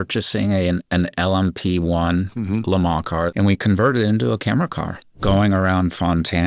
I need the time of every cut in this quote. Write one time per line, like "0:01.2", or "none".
0:03.3
0:05.2